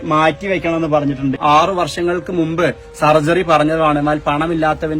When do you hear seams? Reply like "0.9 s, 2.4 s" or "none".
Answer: 1.4 s